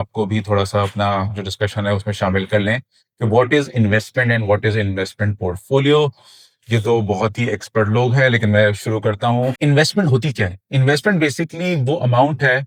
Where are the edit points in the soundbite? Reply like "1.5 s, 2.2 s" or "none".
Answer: none